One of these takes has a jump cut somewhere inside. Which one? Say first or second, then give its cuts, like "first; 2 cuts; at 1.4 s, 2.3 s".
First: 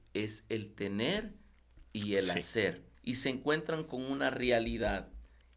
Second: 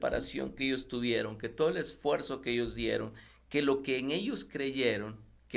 first; 1 cut; at 2.9 s